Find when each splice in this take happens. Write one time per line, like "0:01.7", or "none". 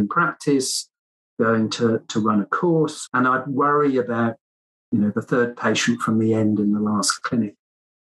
0:03.0

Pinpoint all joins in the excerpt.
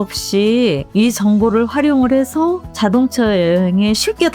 0:00.8
0:02.7

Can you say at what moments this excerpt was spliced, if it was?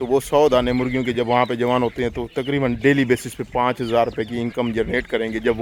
none

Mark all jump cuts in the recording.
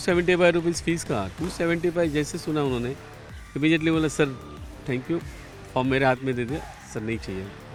none

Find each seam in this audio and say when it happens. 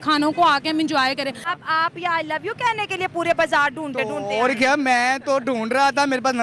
0:01.5

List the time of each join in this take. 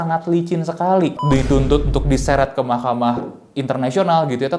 0:01.2

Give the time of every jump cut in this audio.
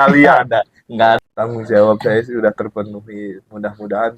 0:01.2

